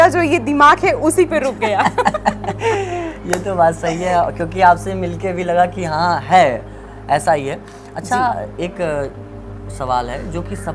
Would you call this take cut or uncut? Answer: uncut